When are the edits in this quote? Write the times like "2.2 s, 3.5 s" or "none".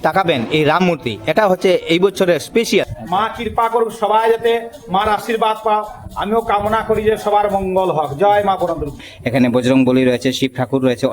3.0 s, 9.1 s